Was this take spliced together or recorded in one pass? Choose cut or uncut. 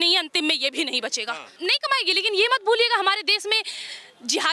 cut